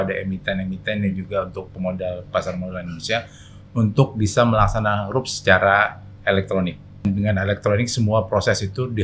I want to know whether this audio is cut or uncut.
cut